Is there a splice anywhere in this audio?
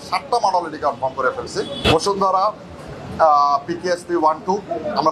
yes; 1 cut; at 1.7 s

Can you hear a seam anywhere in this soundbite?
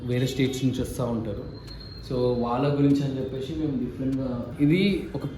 yes; 1 cut; at 4.5 s

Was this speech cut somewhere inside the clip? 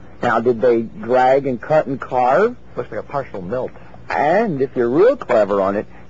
yes; 1 cut; at 4.3 s

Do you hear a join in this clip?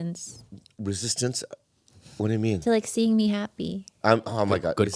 no; 0 cuts

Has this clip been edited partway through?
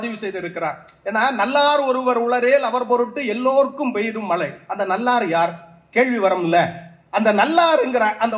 no; 0 cuts

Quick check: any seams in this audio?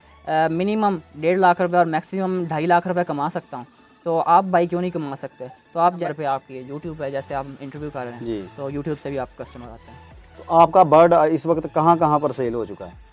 yes; 1 cut; at 6.0 s

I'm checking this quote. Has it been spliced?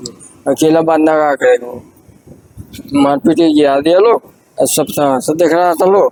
no; 0 cuts

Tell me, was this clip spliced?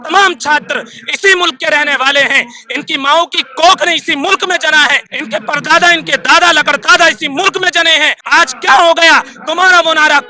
yes; 2 cuts; at 5.1 s, 8.2 s

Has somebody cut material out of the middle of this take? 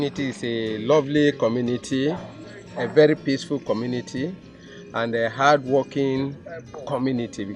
no; 0 cuts

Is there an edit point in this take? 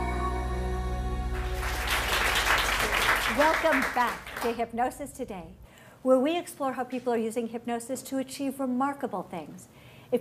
yes; 1 cut; at 7.7 s

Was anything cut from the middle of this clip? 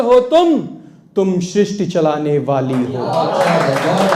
no; 0 cuts

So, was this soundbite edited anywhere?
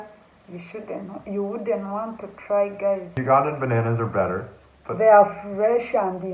yes; 1 cut; at 3.1 s

